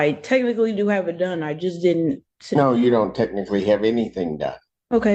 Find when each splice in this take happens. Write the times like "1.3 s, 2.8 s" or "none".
none